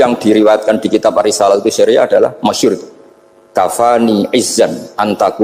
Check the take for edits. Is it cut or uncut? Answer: uncut